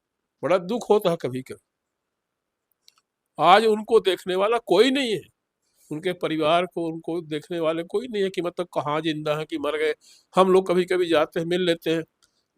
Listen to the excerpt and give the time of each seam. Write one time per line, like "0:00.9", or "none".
none